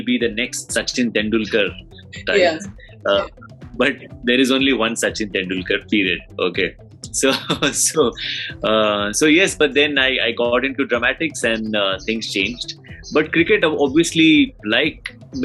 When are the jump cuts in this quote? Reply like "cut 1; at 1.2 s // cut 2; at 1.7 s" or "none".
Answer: none